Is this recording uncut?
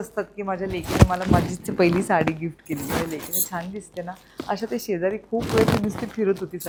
yes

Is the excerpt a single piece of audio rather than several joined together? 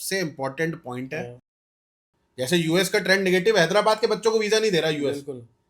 no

